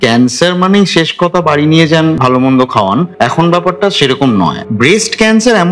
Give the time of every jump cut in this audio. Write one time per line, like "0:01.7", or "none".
0:02.2
0:03.1
0:04.6